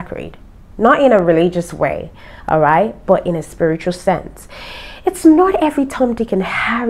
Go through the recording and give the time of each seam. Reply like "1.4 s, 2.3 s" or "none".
none